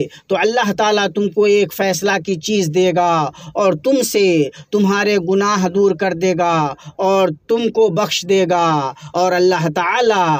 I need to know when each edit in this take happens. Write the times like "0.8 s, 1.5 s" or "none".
none